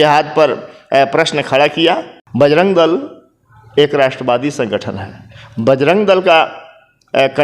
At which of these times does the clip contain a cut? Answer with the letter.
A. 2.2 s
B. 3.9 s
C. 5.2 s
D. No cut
A